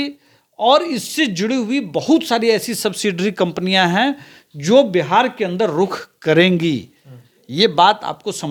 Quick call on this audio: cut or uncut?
uncut